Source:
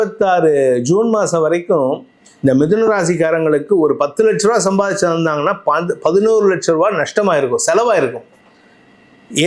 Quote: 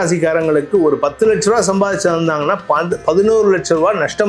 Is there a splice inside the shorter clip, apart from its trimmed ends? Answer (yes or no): no